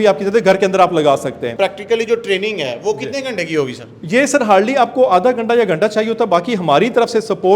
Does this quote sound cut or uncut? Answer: cut